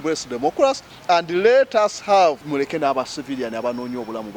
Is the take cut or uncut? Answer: cut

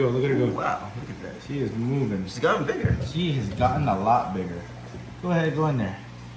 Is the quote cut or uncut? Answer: uncut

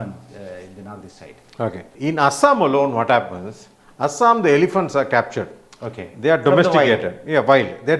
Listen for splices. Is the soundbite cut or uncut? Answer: cut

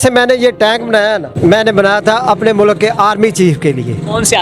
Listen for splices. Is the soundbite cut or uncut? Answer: cut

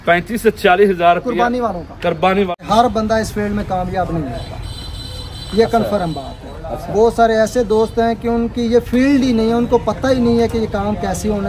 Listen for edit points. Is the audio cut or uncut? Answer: cut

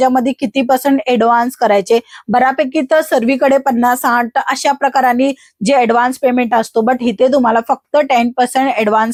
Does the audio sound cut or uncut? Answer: uncut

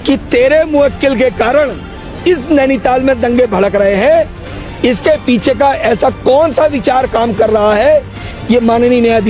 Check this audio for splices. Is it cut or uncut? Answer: cut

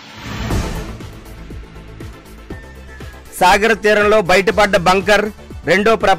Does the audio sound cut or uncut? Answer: cut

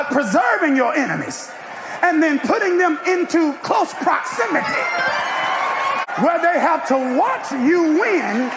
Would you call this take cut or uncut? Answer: cut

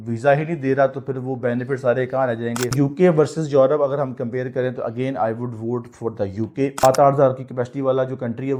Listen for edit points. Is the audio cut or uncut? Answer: cut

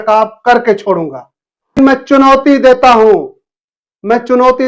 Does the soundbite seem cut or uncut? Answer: cut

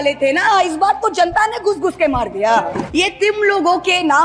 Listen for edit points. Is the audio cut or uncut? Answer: cut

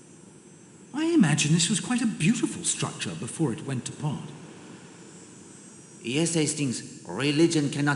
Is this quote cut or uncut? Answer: cut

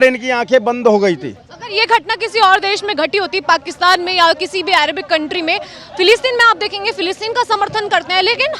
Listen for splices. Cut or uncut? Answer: uncut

